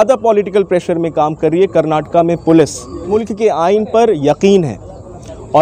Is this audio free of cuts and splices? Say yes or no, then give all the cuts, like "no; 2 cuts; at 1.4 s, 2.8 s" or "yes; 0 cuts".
no; 1 cut; at 3.2 s